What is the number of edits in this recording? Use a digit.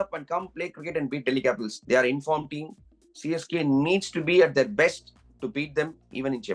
0